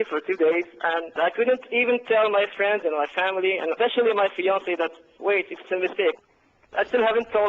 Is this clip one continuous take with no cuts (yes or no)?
no